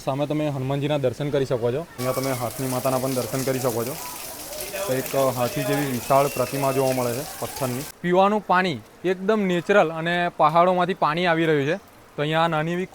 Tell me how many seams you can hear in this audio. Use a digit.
2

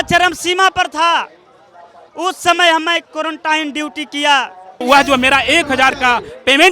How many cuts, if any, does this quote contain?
1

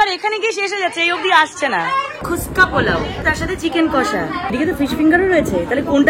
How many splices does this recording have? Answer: 3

